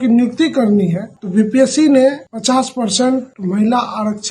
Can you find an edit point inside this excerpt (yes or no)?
yes